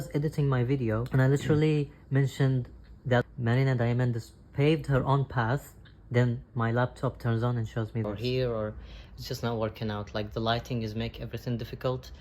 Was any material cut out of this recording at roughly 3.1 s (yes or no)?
no